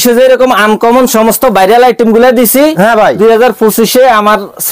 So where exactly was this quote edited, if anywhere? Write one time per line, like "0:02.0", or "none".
none